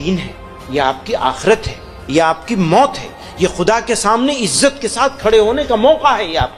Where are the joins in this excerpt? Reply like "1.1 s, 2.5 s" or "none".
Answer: none